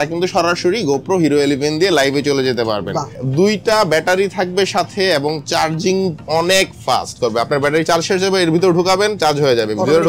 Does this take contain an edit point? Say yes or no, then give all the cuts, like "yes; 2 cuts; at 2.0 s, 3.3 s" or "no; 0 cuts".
yes; 2 cuts; at 3.1 s, 7.1 s